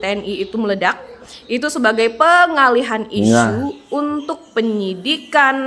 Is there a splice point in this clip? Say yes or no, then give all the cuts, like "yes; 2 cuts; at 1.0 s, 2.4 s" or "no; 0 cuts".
no; 0 cuts